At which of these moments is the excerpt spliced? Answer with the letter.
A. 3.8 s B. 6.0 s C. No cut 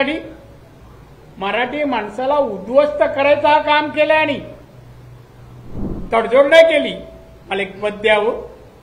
B